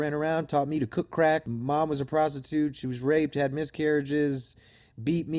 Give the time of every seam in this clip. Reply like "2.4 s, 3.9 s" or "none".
1.4 s